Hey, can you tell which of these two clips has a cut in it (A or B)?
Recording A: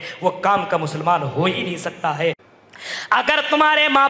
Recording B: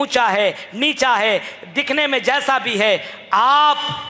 A